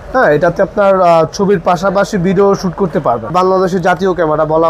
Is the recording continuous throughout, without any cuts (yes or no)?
no